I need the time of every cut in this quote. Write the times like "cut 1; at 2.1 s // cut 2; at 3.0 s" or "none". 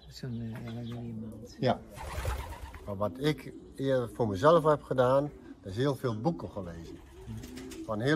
cut 1; at 2.7 s